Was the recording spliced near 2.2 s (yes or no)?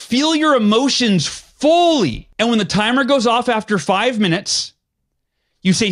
yes